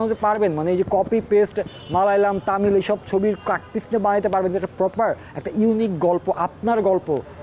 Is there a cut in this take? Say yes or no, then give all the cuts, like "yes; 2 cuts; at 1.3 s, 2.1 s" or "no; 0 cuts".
no; 0 cuts